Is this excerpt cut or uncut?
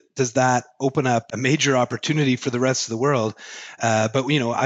cut